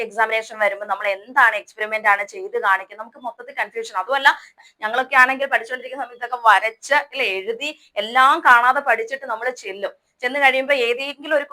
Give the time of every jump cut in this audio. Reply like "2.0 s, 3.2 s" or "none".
4.6 s